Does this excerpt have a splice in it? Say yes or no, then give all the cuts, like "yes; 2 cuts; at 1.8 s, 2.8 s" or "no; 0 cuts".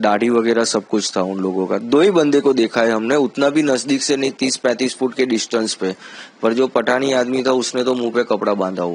no; 0 cuts